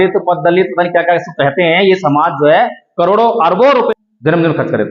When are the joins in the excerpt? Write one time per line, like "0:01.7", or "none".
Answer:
0:03.9